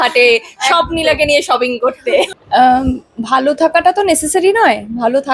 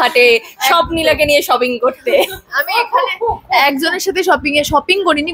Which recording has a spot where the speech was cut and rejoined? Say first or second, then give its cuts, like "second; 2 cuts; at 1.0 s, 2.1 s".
first; 1 cut; at 2.4 s